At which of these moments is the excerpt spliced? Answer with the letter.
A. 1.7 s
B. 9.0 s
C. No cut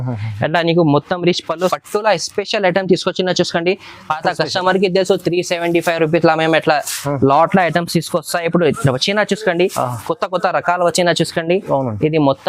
A